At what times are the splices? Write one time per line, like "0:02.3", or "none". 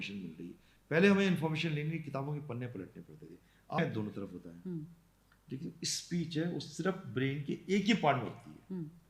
0:03.8